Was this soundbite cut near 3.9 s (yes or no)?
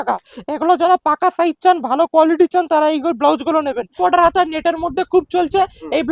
yes